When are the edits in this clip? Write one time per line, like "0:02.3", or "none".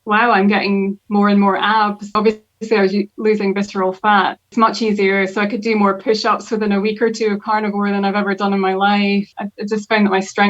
0:02.1
0:04.5
0:09.4